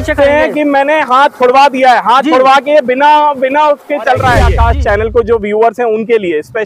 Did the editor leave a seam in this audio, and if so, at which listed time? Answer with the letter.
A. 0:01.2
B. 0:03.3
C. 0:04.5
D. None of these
C